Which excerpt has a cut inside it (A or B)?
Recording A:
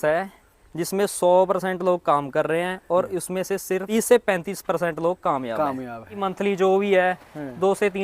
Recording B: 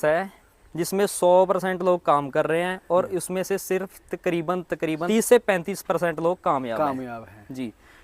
A